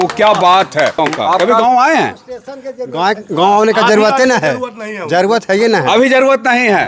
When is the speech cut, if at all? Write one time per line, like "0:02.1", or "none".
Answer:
0:01.4